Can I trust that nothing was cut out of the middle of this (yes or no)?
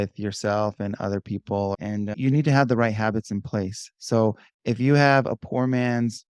no